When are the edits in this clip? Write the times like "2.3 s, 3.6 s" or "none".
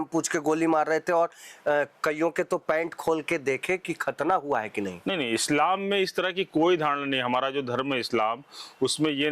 none